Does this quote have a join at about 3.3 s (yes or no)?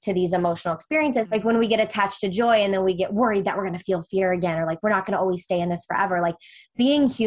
no